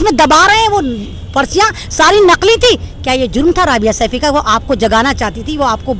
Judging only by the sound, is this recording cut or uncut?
uncut